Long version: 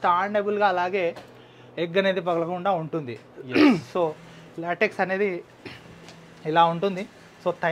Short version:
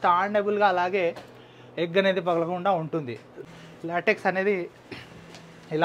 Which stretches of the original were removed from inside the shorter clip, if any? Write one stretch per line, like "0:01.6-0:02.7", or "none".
0:03.4-0:04.2